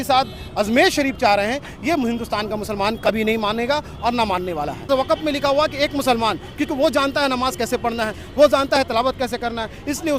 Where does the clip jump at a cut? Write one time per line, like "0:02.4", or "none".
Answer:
0:04.9